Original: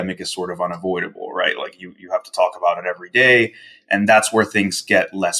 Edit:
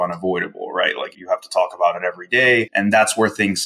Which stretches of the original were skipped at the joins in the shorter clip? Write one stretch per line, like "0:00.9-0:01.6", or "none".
0:01.7-0:01.9
0:03.5-0:03.9